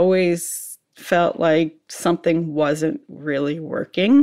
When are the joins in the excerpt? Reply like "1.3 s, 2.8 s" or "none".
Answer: none